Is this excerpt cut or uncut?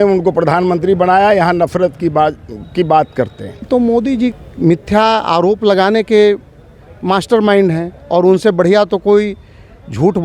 cut